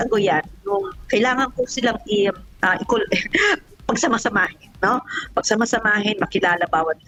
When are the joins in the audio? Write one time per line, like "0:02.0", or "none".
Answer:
none